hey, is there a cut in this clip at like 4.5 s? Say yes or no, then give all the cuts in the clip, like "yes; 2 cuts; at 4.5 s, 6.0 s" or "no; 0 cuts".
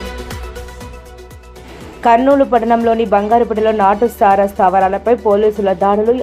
no; 1 cut; at 1.5 s